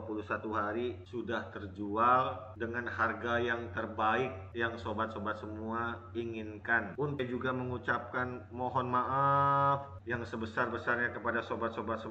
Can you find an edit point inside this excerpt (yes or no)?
yes